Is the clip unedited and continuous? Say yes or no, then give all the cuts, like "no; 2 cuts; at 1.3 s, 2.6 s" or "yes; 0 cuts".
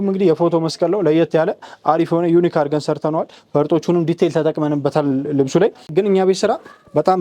no; 1 cut; at 5.8 s